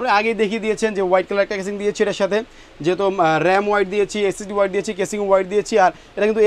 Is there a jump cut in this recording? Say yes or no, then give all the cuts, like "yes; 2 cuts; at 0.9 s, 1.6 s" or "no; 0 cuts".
no; 0 cuts